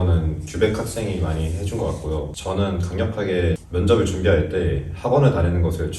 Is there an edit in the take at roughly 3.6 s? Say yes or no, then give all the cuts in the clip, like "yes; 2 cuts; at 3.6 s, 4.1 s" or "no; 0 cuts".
yes; 2 cuts; at 2.3 s, 3.6 s